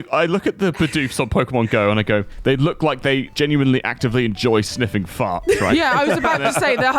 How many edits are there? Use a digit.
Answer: 1